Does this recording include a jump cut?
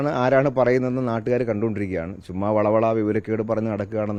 no; 0 cuts

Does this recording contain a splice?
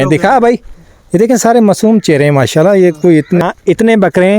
yes; 1 cut; at 3.4 s

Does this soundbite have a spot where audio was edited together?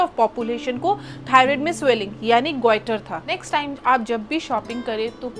yes; 1 cut; at 3.3 s

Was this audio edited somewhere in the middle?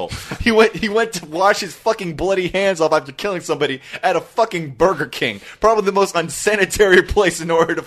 no; 0 cuts

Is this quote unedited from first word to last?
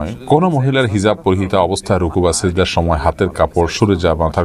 yes; 0 cuts

